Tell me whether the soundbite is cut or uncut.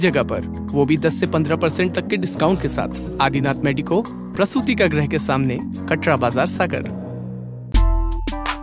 cut